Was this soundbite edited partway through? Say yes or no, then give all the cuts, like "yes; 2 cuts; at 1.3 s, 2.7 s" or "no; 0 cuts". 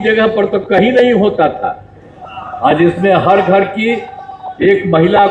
yes; 1 cut; at 2.1 s